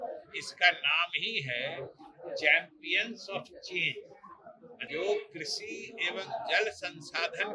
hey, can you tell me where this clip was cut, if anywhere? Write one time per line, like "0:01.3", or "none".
0:04.8